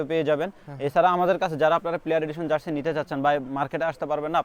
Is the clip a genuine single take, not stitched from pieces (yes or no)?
yes